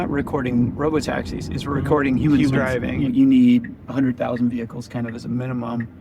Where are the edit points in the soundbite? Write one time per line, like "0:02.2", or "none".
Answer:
0:03.1